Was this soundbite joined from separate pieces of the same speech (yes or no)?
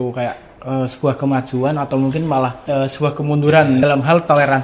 yes